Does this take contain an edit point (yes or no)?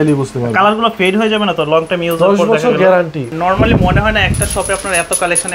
yes